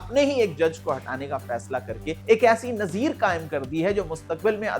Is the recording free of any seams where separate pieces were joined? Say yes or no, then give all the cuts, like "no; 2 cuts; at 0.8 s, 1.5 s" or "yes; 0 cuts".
no; 1 cut; at 2.2 s